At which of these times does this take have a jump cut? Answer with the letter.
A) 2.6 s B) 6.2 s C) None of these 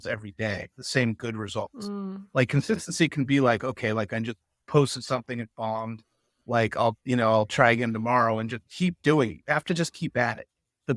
C